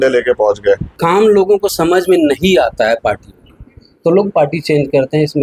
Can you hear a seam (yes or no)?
yes